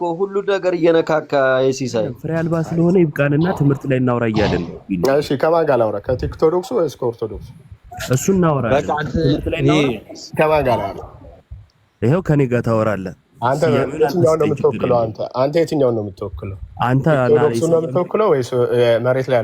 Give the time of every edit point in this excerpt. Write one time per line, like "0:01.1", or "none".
0:02.2

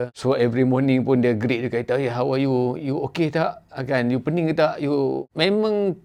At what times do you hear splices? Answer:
none

